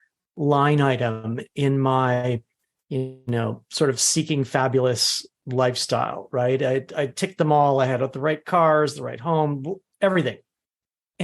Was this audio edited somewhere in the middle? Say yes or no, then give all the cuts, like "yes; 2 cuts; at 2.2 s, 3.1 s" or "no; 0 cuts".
yes; 1 cut; at 2.6 s